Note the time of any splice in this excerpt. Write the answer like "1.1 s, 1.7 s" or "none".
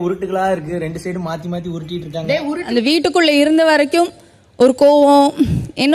2.6 s